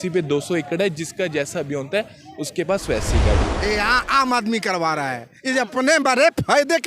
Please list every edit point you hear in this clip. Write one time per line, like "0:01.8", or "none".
0:03.5